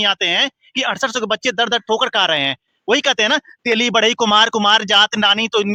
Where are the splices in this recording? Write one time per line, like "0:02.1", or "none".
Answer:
none